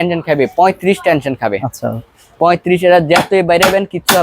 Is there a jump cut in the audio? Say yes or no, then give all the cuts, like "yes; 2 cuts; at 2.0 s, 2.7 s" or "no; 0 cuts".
no; 0 cuts